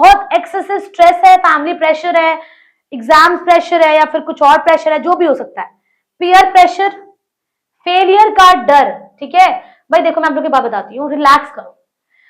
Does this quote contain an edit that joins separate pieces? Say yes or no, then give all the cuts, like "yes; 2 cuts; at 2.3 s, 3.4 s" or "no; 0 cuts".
no; 0 cuts